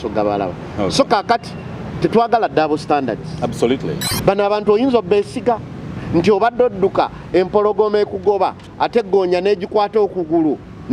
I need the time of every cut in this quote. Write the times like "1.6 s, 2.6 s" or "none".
4.1 s